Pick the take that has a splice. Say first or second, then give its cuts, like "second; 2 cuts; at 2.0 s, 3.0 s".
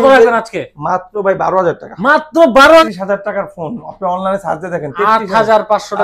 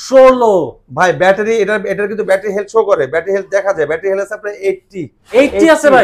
first; 1 cut; at 2.8 s